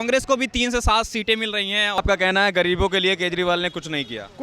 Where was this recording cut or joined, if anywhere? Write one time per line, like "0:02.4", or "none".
0:02.0

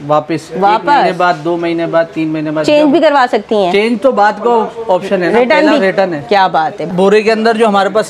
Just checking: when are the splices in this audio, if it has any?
0:06.8

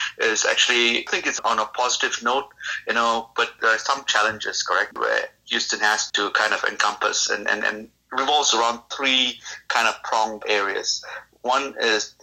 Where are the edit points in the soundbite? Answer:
0:01.1
0:03.6
0:04.9
0:06.1
0:08.0
0:10.4

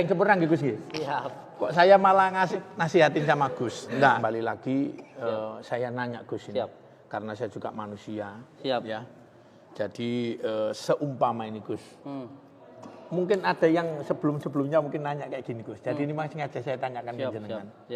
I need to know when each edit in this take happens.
0:04.2

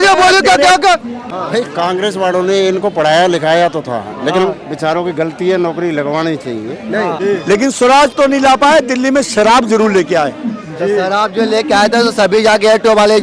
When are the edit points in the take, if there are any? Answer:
0:01.3
0:07.1

